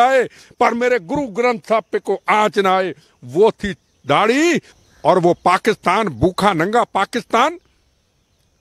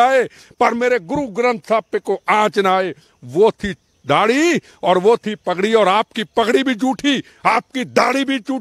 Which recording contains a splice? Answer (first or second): first